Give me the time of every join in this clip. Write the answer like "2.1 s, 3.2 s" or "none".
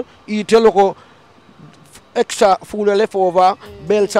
none